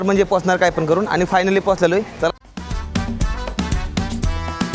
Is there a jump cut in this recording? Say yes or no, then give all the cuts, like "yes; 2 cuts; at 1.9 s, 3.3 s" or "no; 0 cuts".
yes; 1 cut; at 2.3 s